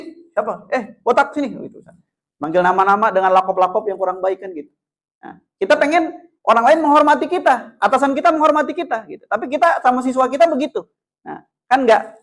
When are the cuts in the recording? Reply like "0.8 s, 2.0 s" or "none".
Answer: none